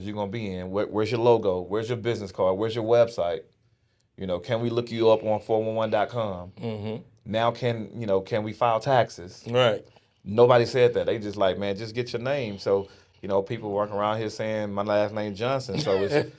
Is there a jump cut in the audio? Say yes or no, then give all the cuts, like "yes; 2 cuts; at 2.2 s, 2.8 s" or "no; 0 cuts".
no; 0 cuts